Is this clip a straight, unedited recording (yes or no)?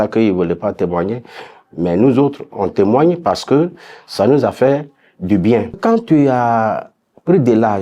no